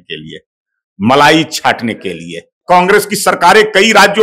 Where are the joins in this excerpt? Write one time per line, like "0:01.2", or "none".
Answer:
0:02.5